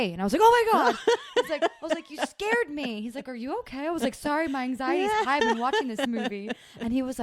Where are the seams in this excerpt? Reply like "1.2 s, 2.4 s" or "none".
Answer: 6.1 s